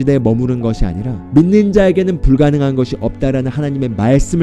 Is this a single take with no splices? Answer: no; 1 cut; at 1.1 s

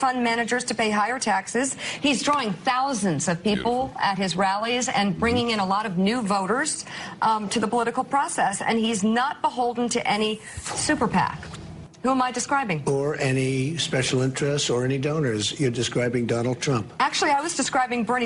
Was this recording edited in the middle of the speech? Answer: yes; 1 cut; at 17.2 s

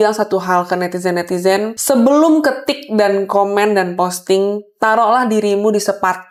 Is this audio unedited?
yes; 0 cuts

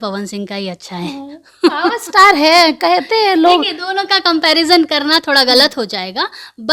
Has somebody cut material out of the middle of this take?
no; 0 cuts

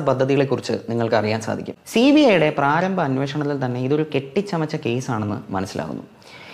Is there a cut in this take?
yes; 1 cut; at 1.7 s

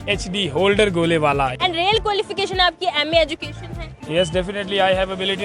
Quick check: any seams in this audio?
yes; 1 cut; at 1.5 s

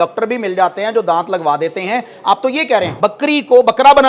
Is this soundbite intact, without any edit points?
no; 1 cut; at 2.9 s

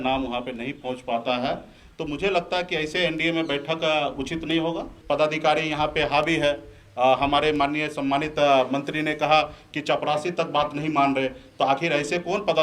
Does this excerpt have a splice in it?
yes; 1 cut; at 4.9 s

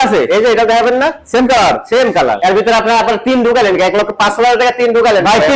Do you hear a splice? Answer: yes; 1 cut; at 2.4 s

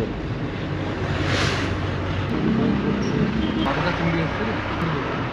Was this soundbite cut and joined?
no; 0 cuts

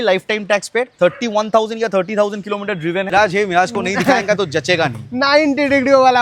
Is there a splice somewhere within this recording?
yes; 1 cut; at 3.1 s

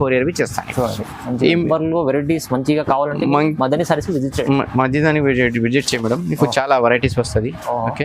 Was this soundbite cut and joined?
yes; 1 cut; at 1.7 s

